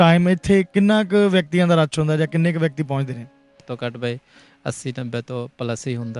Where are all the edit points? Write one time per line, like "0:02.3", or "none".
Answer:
0:03.6